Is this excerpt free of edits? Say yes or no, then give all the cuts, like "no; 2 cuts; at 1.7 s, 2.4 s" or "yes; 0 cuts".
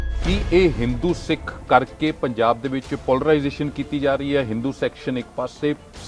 yes; 0 cuts